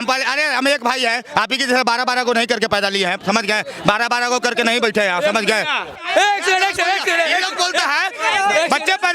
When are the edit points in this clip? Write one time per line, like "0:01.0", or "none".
0:06.0